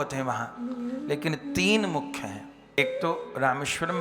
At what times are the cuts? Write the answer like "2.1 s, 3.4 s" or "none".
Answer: 2.7 s